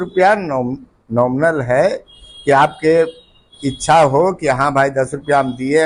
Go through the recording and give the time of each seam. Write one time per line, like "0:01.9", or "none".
none